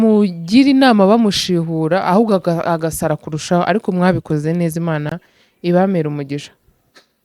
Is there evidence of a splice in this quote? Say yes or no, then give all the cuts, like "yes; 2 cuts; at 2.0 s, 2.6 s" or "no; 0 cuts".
no; 0 cuts